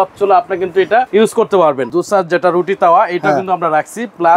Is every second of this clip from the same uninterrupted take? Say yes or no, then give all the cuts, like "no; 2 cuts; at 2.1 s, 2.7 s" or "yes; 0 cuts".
no; 2 cuts; at 1.1 s, 1.9 s